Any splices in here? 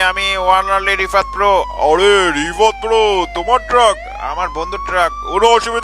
no; 0 cuts

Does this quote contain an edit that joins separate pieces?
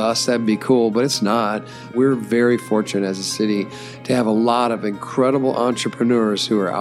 yes; 1 cut; at 1.9 s

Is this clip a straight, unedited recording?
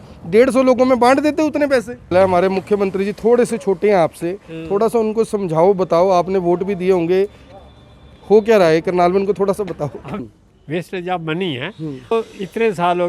no; 3 cuts; at 2.1 s, 10.1 s, 12.1 s

